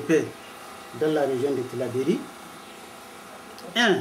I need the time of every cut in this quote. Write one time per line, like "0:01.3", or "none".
none